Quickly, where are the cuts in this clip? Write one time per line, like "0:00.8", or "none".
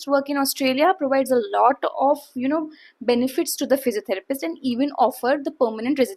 none